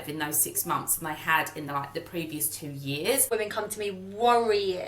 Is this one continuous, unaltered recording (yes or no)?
no